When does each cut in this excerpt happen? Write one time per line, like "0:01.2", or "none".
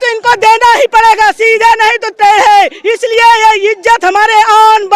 none